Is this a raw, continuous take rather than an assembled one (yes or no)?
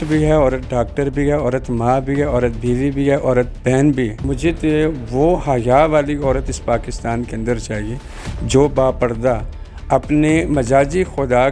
no